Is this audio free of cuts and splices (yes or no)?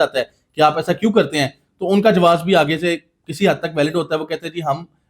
yes